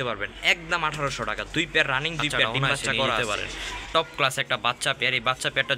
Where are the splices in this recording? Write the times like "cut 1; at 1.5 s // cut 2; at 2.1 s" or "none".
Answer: cut 1; at 3.2 s